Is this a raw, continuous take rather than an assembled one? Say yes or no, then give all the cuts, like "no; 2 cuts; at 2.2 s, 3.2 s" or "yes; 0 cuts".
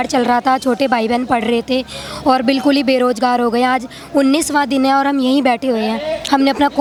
yes; 0 cuts